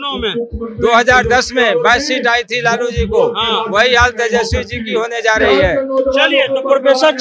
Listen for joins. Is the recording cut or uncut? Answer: uncut